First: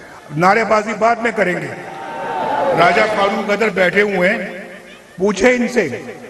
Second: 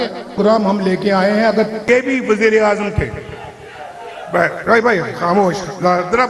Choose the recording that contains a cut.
second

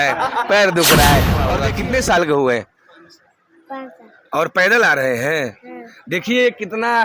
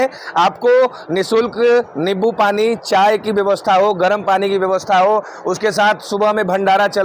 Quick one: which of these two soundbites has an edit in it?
first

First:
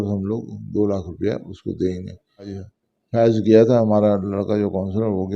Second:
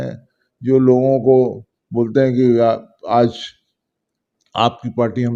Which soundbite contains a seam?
first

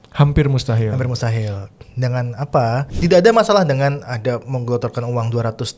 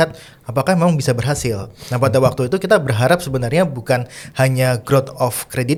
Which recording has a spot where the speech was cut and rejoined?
first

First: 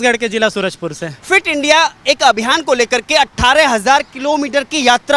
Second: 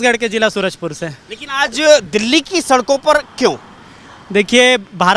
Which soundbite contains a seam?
first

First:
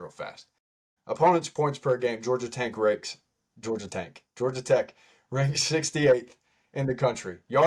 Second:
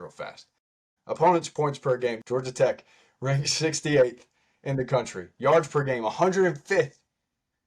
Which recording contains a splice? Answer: second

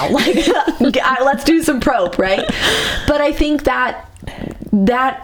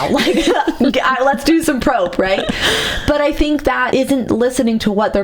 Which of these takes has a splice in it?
second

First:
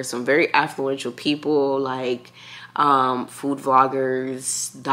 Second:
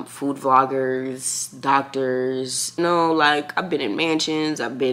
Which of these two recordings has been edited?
second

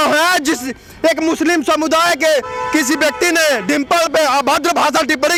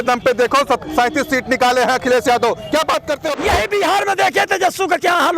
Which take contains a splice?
second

